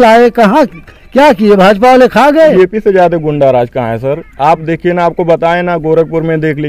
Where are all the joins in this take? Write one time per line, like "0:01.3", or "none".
0:02.4